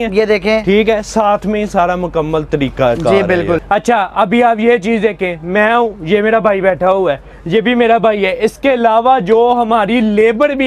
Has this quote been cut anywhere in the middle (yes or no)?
no